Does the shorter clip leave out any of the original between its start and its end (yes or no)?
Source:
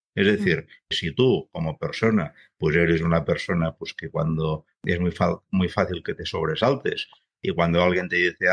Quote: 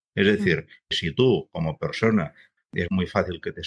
yes